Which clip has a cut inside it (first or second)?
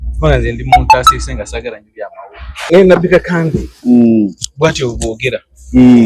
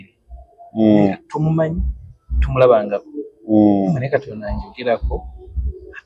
first